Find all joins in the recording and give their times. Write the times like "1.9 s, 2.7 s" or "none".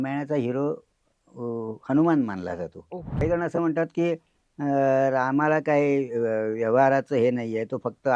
3.2 s